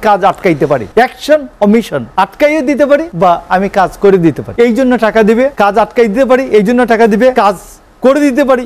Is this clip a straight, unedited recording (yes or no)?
no